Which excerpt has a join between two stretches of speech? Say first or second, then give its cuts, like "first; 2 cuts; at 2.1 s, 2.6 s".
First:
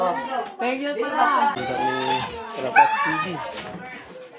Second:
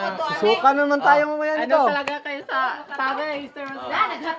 first; 1 cut; at 1.6 s